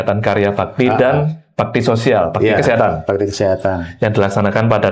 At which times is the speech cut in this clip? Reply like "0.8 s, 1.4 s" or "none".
none